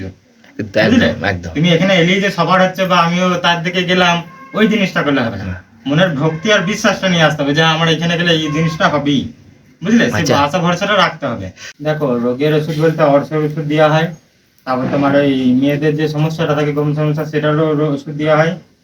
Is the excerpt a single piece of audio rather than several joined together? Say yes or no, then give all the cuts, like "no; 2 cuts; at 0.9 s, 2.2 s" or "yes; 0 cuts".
no; 1 cut; at 11.7 s